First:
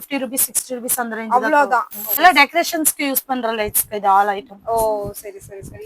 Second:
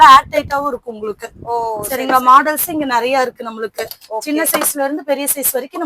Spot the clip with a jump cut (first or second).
first